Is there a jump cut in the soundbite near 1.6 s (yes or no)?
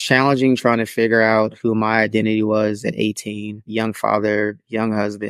no